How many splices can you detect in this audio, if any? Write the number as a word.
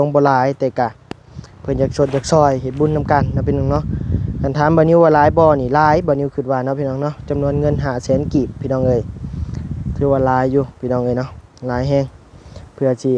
zero